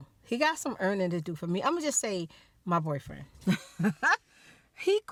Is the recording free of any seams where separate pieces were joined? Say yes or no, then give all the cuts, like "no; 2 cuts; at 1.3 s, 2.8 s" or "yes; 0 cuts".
yes; 0 cuts